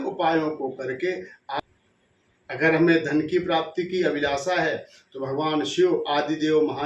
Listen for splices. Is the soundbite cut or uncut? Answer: cut